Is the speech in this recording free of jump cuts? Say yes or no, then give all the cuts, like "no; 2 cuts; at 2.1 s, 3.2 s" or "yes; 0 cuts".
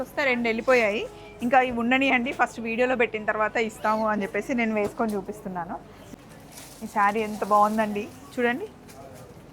no; 1 cut; at 6.0 s